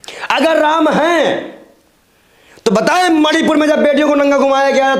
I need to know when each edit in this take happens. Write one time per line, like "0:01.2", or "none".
none